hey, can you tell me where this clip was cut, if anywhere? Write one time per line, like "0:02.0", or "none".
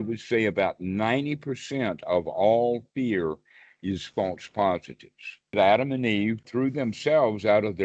0:05.5
0:06.5